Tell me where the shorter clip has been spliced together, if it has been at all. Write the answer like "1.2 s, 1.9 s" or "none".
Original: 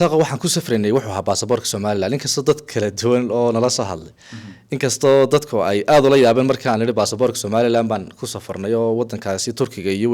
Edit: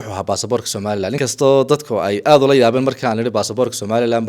1.2 s